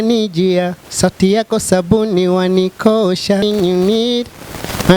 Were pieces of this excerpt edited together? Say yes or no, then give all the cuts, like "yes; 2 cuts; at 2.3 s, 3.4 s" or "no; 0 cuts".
yes; 1 cut; at 3.5 s